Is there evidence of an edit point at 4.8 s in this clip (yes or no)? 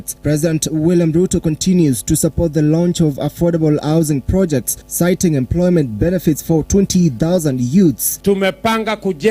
yes